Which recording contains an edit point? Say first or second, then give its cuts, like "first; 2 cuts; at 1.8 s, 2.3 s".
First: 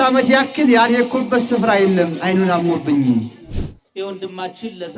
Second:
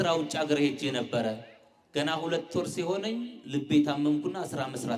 first; 1 cut; at 3.7 s